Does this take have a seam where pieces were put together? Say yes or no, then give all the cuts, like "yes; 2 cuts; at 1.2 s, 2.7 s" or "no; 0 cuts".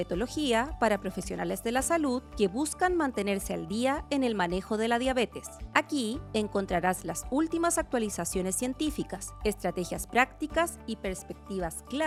no; 0 cuts